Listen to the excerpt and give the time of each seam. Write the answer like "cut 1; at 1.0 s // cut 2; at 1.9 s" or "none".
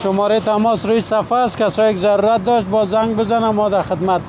none